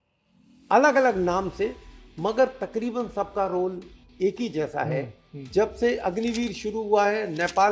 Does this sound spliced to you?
yes; 1 cut; at 5.5 s

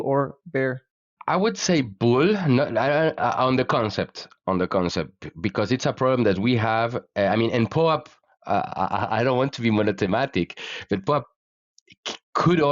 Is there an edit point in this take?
yes; 1 cut; at 1.1 s

